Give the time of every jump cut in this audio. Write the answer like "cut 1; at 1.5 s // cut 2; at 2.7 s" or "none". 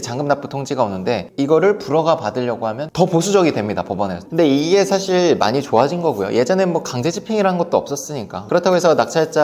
cut 1; at 1.3 s // cut 2; at 2.8 s // cut 3; at 4.2 s